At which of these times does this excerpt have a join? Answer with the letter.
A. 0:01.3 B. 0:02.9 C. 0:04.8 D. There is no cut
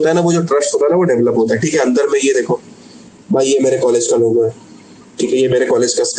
D